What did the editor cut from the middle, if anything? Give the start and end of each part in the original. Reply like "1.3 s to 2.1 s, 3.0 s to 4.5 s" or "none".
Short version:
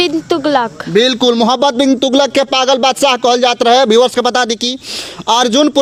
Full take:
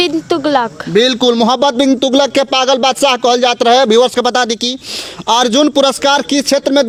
none